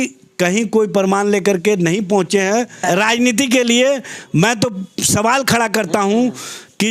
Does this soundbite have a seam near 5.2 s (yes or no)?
no